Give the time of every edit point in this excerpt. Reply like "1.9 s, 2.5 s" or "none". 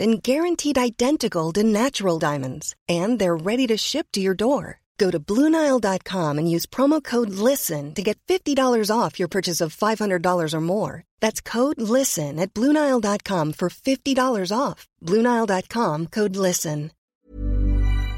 17.0 s